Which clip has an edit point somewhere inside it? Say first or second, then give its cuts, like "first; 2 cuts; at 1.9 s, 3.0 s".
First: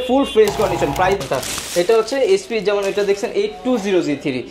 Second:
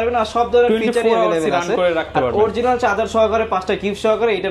first; 1 cut; at 1.2 s